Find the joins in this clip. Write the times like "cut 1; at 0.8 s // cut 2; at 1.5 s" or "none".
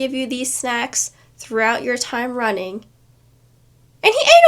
none